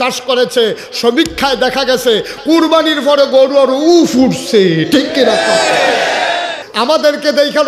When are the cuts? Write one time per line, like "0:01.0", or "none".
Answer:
0:06.6